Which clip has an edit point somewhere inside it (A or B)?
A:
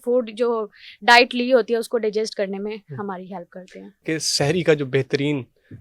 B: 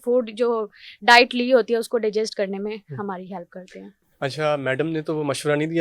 A